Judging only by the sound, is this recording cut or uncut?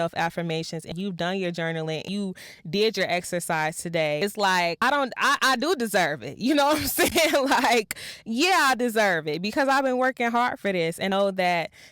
cut